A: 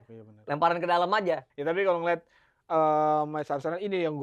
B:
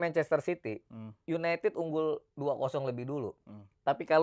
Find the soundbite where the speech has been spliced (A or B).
A